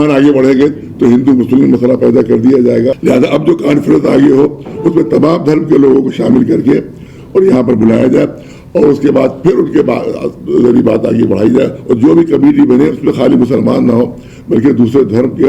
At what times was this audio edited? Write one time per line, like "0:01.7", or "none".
0:03.0

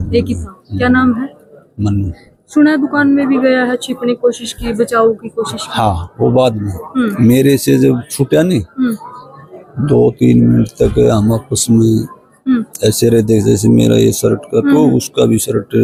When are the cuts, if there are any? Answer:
none

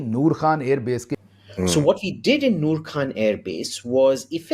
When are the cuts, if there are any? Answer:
0:01.1

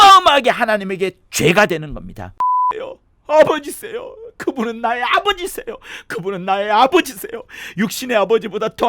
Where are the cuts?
0:02.5

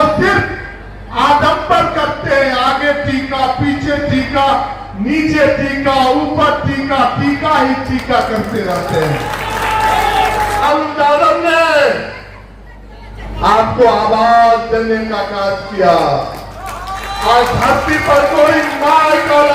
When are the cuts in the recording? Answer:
0:10.6

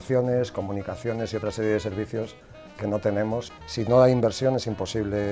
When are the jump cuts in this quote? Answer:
0:03.5

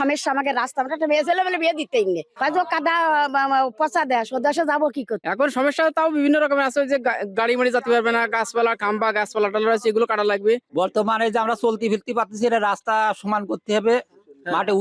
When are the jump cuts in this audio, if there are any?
0:02.3
0:05.2
0:10.7

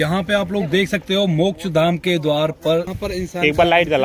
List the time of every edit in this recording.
0:02.9

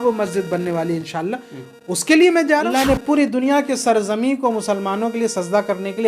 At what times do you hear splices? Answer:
0:02.7

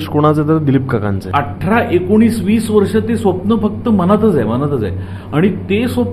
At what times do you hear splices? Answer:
0:01.2

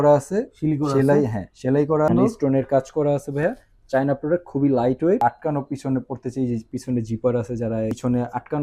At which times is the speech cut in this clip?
0:02.1
0:05.2

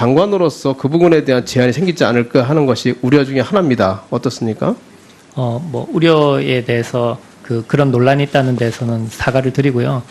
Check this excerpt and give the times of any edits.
0:03.7

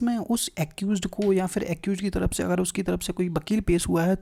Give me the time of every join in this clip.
none

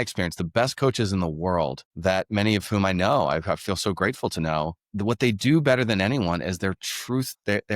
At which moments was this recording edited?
0:04.8

